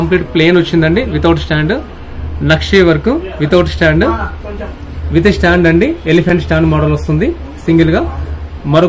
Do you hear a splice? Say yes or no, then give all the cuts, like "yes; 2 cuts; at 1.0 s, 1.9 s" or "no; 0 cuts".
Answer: no; 0 cuts